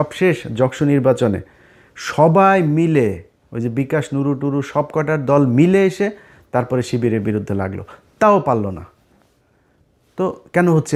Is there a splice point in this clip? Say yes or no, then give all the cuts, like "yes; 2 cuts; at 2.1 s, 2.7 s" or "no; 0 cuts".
no; 0 cuts